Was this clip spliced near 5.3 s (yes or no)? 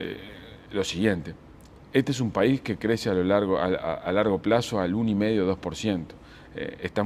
no